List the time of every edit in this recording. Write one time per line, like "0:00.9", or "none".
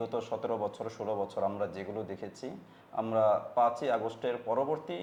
none

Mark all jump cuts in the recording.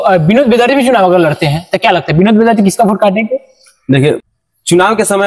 0:04.2

